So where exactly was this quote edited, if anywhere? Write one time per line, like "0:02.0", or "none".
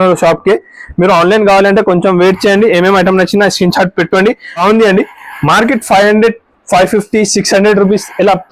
0:04.6